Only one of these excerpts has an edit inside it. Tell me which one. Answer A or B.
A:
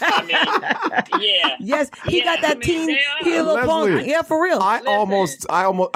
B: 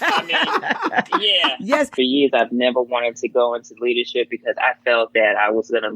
B